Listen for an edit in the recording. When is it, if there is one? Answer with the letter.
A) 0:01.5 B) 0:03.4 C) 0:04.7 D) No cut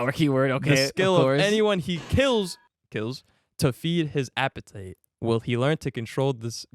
D